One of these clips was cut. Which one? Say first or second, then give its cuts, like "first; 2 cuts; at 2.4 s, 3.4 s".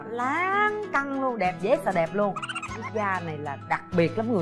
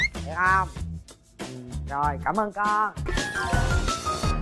second; 1 cut; at 3.1 s